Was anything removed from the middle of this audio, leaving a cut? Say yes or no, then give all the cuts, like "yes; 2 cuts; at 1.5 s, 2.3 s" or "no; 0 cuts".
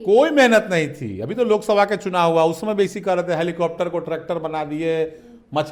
no; 0 cuts